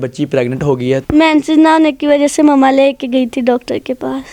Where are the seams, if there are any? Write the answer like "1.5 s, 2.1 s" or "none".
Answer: 1.0 s